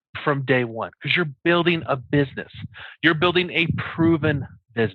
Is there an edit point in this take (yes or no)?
no